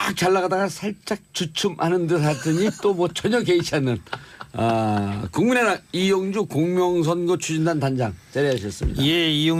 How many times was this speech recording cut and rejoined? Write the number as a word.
zero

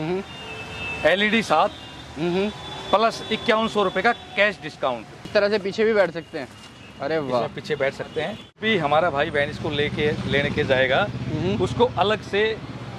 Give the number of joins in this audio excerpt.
two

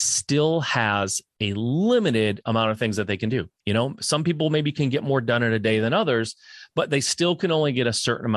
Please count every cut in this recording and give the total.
one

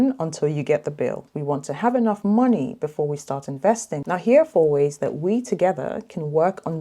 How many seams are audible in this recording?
two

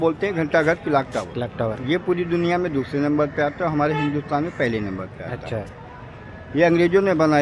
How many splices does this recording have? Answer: zero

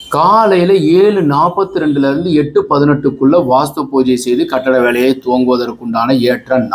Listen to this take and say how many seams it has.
zero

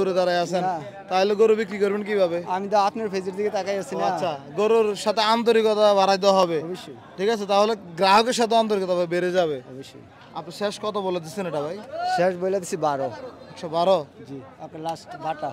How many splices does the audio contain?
zero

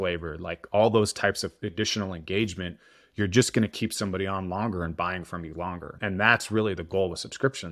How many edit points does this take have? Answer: one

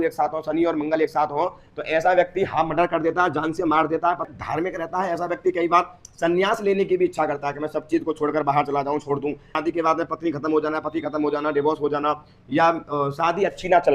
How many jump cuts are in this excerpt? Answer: two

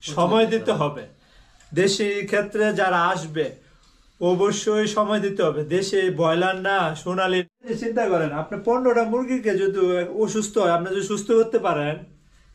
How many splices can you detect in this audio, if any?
one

